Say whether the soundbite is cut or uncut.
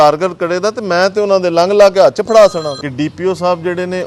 cut